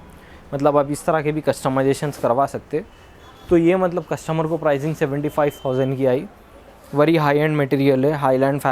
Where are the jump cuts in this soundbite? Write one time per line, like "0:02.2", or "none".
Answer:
none